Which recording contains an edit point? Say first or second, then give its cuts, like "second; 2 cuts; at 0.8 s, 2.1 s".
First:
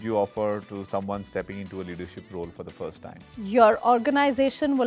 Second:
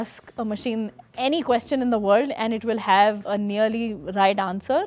second; 1 cut; at 3.2 s